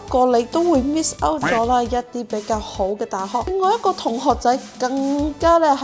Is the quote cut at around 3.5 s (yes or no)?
yes